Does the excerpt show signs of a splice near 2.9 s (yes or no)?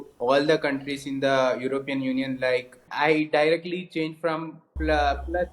yes